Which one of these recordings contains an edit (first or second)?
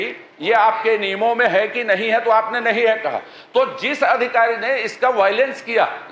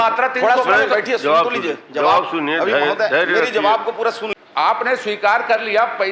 second